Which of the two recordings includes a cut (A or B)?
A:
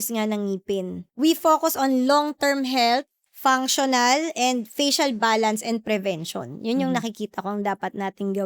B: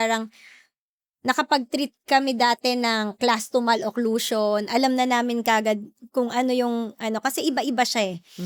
A